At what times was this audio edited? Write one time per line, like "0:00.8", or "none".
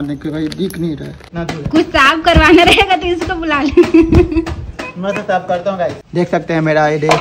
0:01.2
0:06.0